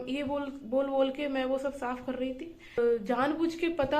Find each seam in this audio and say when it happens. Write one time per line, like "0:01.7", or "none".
0:02.8